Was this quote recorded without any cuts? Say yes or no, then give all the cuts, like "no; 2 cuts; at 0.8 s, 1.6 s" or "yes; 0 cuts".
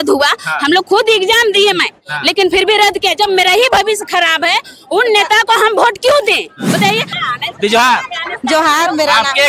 no; 1 cut; at 7.2 s